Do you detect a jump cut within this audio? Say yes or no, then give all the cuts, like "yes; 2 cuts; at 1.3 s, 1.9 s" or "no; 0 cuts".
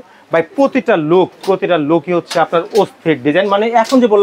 no; 0 cuts